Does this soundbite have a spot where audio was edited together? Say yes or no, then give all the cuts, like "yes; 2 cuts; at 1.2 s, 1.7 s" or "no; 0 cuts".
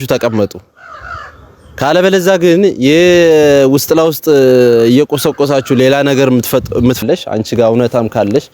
yes; 1 cut; at 7.0 s